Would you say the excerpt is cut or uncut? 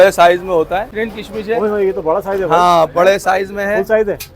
cut